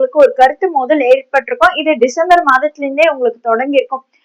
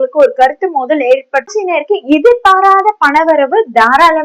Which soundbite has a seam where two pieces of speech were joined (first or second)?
second